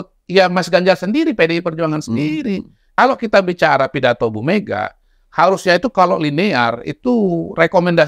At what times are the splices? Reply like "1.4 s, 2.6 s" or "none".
2.8 s